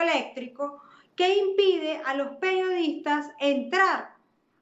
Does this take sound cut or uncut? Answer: cut